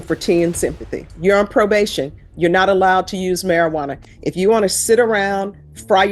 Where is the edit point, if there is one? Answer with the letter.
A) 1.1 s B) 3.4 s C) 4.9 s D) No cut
A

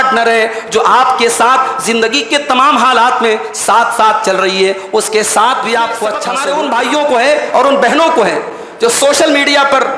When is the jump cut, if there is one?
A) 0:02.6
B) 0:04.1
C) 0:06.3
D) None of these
C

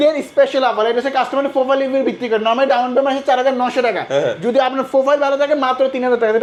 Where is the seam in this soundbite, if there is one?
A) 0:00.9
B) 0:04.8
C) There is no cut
C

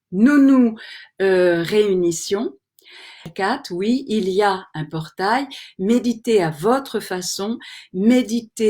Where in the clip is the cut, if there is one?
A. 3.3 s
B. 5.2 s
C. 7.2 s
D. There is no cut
A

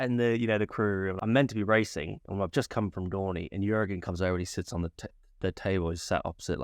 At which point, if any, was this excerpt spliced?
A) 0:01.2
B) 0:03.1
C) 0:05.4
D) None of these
A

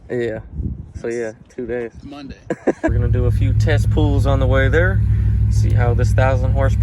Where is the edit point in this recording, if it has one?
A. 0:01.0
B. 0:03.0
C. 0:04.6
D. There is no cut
B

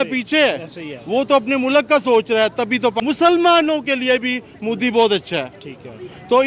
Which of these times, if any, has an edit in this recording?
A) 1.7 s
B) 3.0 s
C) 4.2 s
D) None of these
B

